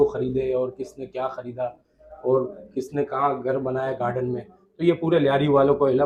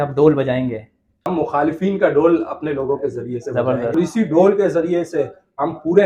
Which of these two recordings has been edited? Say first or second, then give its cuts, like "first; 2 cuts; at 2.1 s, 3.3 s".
second; 2 cuts; at 1.3 s, 4.0 s